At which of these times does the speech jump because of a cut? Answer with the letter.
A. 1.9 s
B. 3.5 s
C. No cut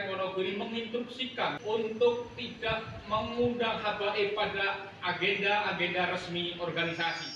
A